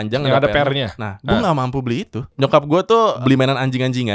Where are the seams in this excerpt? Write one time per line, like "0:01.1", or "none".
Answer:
0:02.2
0:03.2